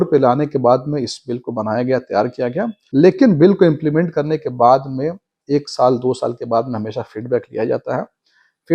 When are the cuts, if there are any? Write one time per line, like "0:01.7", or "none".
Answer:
0:02.8